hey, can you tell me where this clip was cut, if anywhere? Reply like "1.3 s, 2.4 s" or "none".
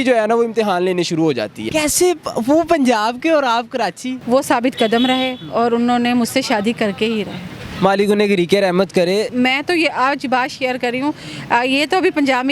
1.7 s, 4.1 s, 9.3 s